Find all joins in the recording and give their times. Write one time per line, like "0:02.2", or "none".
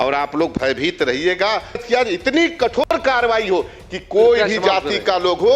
0:01.8